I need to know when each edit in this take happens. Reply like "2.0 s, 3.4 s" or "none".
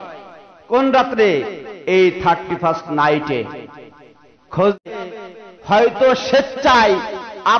4.8 s